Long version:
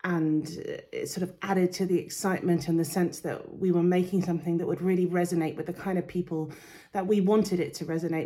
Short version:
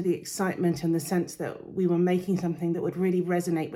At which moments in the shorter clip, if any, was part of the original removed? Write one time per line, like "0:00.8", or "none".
none

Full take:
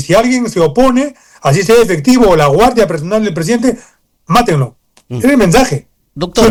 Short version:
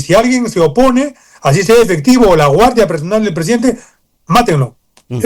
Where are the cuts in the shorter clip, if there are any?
none

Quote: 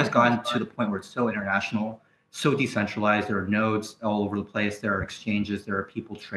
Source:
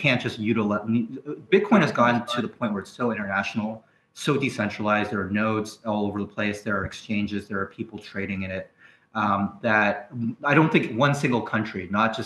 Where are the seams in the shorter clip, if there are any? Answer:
none

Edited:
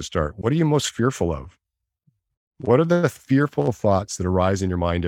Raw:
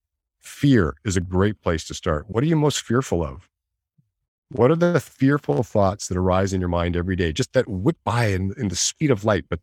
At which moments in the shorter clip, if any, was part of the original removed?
none

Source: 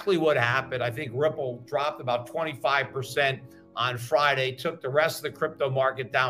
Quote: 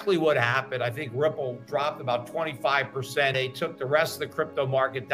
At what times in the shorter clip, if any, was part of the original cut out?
0:03.3

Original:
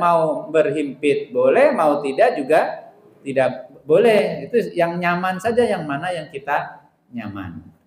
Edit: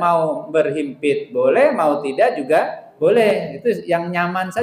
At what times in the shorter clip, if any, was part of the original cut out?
0:02.8

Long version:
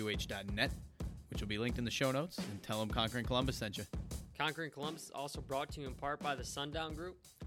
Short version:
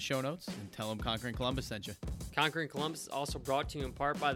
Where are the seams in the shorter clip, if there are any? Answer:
0:02.2

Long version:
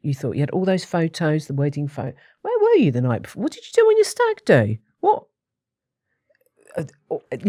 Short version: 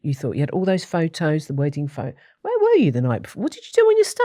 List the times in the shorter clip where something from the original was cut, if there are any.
none

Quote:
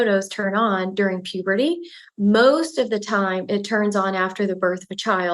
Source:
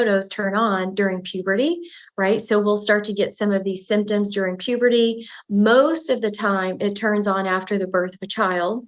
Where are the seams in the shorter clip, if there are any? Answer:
0:02.0

